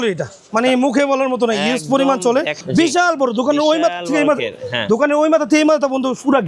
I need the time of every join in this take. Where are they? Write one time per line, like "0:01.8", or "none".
0:02.5